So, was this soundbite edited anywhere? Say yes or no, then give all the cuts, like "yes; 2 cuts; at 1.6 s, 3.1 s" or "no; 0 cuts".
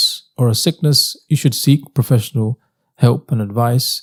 no; 0 cuts